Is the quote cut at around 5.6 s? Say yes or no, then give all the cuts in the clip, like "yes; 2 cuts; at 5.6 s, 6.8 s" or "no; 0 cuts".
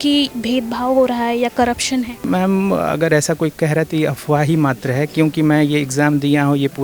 no; 1 cut; at 2.1 s